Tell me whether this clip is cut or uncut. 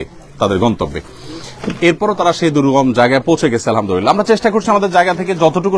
uncut